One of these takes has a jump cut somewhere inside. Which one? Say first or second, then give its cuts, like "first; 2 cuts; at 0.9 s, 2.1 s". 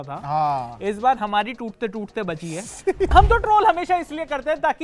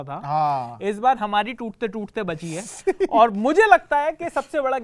first; 1 cut; at 3.1 s